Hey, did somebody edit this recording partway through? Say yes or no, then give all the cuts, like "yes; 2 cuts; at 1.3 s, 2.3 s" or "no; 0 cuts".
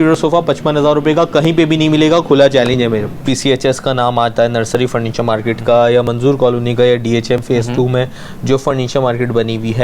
yes; 1 cut; at 3.1 s